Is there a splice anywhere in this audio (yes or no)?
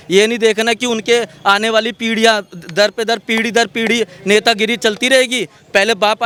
no